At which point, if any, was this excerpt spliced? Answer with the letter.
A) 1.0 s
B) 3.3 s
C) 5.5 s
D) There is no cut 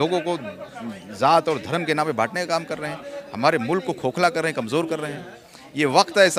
D